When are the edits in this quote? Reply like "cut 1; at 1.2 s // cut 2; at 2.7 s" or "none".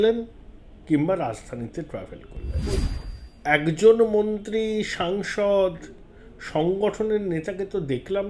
cut 1; at 2.7 s